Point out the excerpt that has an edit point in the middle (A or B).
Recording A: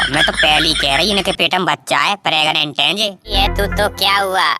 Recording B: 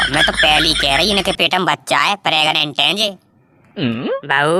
A